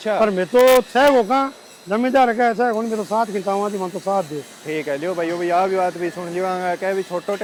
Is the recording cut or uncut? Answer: uncut